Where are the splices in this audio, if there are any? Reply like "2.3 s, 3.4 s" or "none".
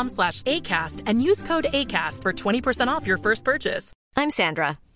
none